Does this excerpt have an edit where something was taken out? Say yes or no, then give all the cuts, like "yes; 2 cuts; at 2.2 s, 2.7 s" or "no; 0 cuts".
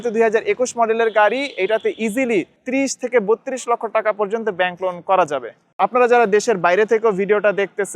yes; 2 cuts; at 2.6 s, 5.8 s